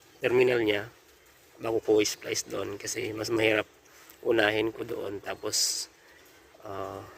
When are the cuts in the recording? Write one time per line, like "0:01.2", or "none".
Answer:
none